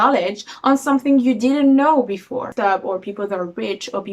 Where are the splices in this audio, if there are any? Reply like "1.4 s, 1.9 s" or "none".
2.5 s

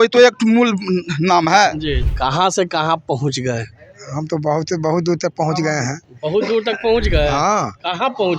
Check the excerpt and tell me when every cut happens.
2.0 s

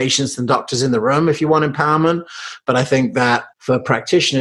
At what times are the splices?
3.5 s

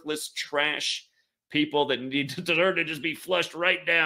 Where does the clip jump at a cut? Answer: none

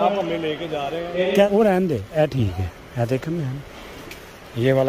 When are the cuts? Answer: 1.5 s

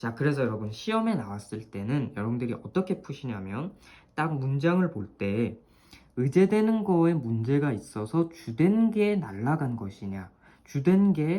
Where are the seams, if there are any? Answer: none

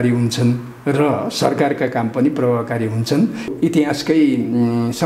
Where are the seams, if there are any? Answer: 3.5 s

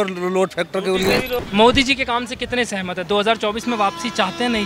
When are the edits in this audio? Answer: 1.4 s

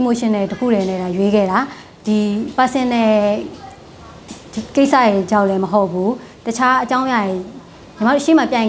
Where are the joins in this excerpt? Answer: none

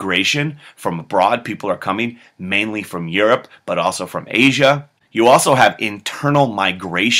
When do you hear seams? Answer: 1.3 s

